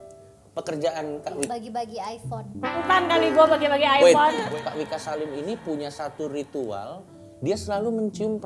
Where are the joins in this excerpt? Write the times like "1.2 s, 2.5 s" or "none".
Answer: 1.5 s, 2.8 s, 4.4 s